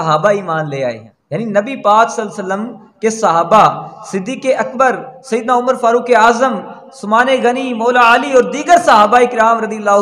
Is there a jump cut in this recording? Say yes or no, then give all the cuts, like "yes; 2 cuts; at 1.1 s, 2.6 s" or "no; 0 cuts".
no; 0 cuts